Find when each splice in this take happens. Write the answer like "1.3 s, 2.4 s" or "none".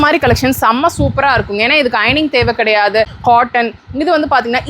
3.1 s